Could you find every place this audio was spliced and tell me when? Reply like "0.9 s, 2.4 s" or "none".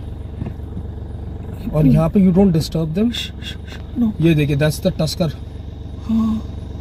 none